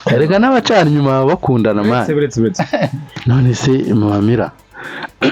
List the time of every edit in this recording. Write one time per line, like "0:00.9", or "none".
0:03.1